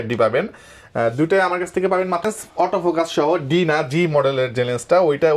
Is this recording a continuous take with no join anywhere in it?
no; 1 cut; at 2.2 s

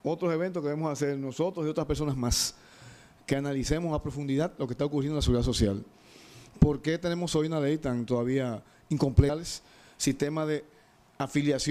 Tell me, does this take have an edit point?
no; 0 cuts

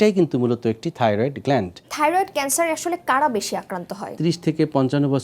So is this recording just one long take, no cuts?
no; 2 cuts; at 1.9 s, 4.2 s

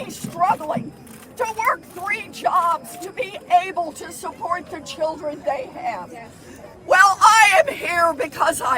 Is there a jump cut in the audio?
yes; 1 cut; at 1.5 s

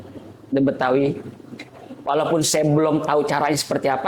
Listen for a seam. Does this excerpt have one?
no; 0 cuts

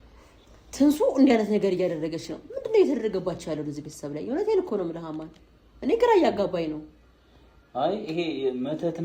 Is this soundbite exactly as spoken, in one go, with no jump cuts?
yes; 0 cuts

